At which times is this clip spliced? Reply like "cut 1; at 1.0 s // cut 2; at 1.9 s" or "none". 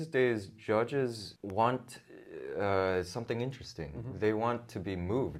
cut 1; at 1.3 s